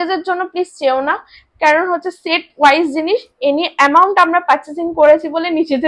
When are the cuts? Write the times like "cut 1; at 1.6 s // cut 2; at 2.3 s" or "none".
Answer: none